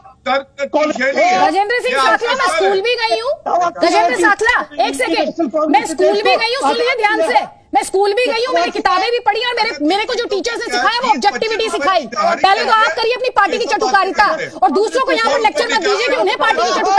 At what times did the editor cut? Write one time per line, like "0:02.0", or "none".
none